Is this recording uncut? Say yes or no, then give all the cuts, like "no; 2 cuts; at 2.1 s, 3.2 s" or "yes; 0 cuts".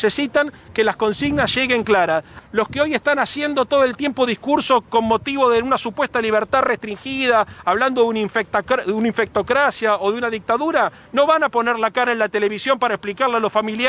no; 1 cut; at 2.3 s